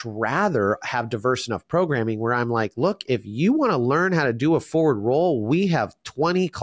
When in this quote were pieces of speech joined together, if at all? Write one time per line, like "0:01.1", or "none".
none